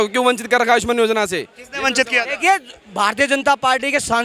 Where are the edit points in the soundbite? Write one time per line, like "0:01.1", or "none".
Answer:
none

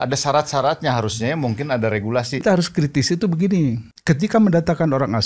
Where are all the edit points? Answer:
0:02.4
0:03.9

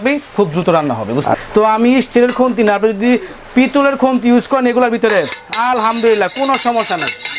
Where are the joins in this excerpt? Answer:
0:01.3

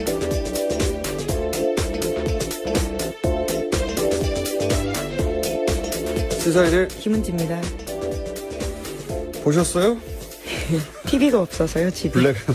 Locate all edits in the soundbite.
none

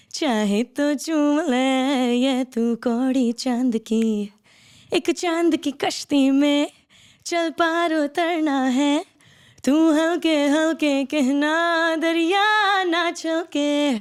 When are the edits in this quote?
none

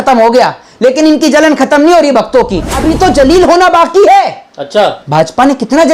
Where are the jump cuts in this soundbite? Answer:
0:02.8

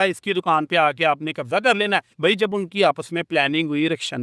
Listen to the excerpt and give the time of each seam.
0:02.1

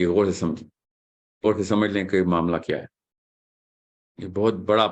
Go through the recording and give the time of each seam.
0:01.5

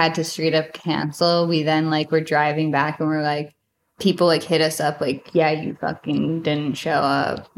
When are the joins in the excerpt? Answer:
none

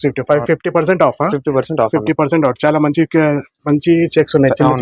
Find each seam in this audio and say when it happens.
none

